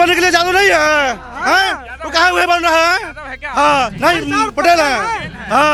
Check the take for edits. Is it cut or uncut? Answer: uncut